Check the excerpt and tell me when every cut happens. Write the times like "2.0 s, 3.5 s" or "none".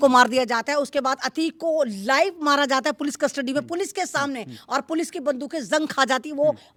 none